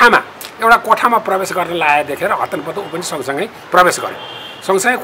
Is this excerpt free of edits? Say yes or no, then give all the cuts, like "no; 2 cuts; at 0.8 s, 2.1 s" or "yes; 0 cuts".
yes; 0 cuts